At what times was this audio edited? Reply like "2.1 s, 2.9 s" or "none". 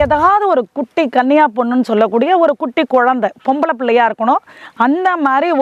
none